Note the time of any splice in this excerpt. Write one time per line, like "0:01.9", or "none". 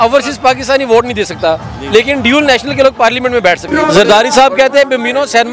0:03.6